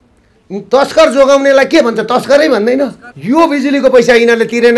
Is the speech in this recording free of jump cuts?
no; 1 cut; at 3.1 s

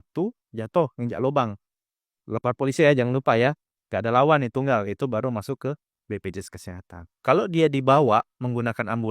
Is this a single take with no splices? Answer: no; 1 cut; at 7.0 s

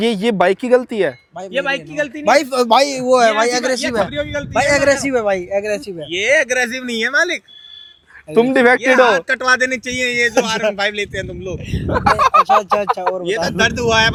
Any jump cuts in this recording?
no; 0 cuts

